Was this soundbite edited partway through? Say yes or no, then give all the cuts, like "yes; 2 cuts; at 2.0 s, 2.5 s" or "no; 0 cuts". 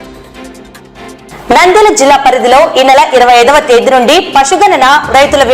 yes; 1 cut; at 1.1 s